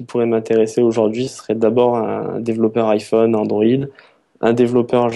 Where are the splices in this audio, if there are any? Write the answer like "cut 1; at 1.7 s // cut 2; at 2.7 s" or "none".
none